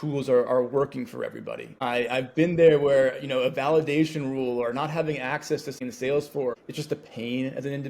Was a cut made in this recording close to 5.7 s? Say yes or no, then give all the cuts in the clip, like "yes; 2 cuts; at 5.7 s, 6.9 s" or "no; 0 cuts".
yes; 1 cut; at 5.7 s